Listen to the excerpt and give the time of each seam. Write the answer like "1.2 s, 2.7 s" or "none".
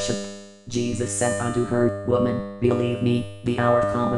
none